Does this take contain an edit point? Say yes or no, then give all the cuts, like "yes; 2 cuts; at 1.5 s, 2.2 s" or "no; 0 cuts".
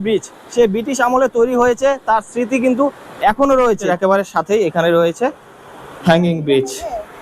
yes; 1 cut; at 3.8 s